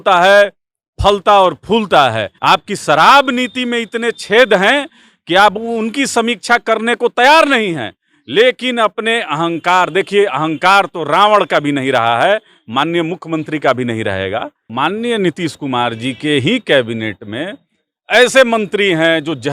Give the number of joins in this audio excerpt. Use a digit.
2